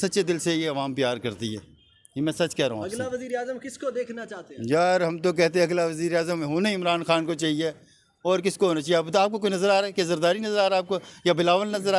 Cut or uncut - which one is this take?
uncut